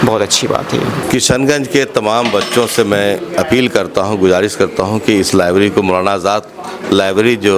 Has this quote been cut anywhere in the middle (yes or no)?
yes